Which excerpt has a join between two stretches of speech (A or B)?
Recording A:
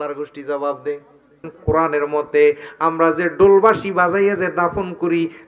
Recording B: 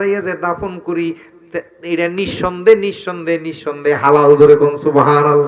A